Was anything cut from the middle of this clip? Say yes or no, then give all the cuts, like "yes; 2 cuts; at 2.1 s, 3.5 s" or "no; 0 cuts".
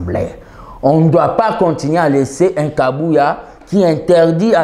no; 0 cuts